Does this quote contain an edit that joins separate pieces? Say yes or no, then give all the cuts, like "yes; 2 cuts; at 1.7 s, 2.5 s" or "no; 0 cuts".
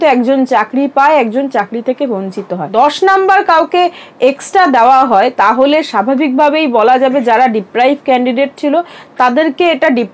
yes; 1 cut; at 2.7 s